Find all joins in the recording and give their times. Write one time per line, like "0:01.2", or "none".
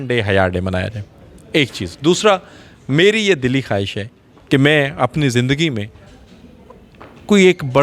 none